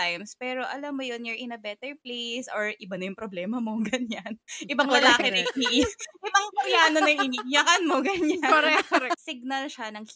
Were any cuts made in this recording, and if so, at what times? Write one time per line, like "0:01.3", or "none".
0:09.3

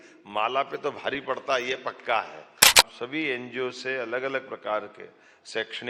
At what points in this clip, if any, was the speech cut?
0:02.8

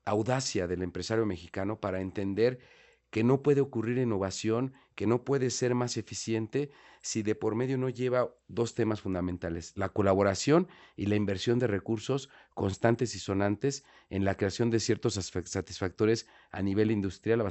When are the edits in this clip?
none

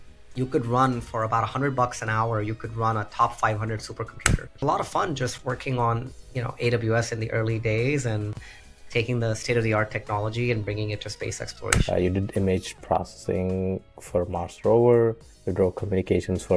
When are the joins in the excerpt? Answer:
0:04.5
0:11.7

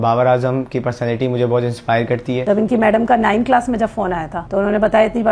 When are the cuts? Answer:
0:02.4
0:04.4

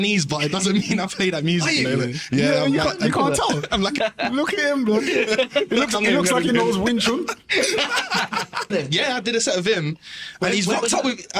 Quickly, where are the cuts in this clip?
0:04.0
0:08.7

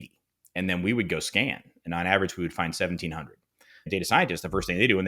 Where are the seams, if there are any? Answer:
0:03.9

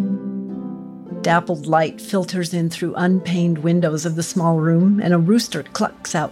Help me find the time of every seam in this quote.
0:01.1

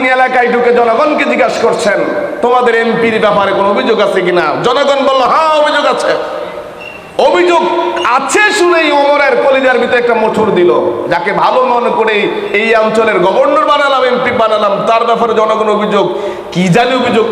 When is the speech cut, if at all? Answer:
none

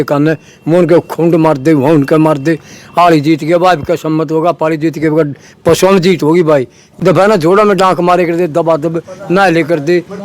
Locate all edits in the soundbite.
0:06.8

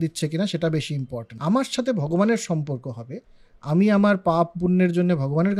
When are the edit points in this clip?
0:01.3

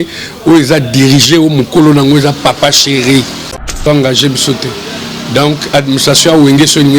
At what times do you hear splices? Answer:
0:03.8

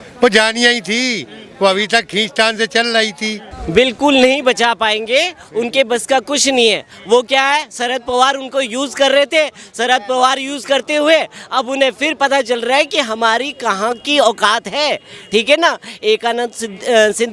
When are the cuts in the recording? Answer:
0:03.5

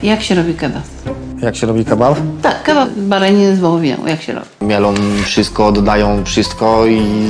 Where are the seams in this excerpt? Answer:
0:04.5

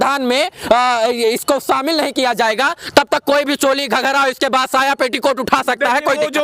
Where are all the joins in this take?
none

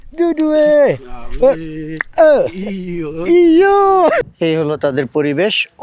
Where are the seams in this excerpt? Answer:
0:04.2

